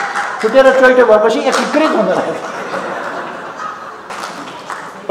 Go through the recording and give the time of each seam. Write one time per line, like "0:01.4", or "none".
0:04.1